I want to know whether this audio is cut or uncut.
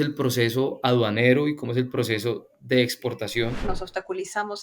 cut